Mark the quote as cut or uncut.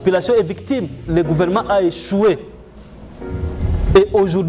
cut